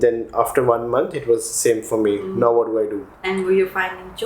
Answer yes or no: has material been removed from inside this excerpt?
no